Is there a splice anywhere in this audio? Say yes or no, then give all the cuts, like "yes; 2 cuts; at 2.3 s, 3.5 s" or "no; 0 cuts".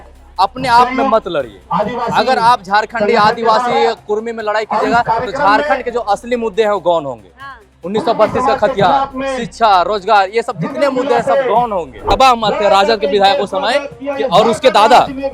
yes; 1 cut; at 12.0 s